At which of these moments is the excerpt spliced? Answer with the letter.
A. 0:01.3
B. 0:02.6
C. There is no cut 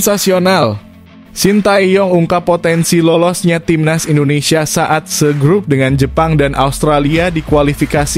C